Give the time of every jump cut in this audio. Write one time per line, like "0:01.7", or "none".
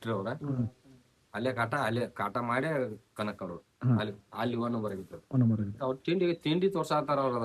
0:05.8